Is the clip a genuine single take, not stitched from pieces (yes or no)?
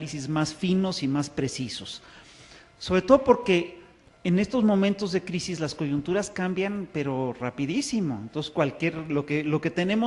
yes